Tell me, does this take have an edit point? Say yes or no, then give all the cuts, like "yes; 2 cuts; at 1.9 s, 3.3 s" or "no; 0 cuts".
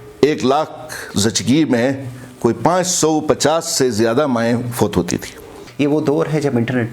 yes; 1 cut; at 5.6 s